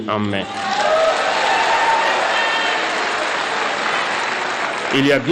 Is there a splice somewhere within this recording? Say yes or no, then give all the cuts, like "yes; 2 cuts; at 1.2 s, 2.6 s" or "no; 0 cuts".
no; 0 cuts